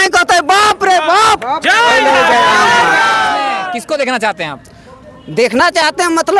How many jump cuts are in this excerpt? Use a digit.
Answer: 1